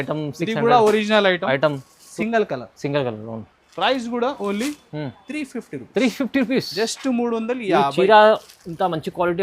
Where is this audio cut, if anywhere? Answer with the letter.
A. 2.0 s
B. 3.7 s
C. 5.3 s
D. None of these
A